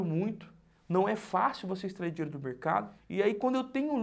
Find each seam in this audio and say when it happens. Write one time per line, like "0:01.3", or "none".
0:03.0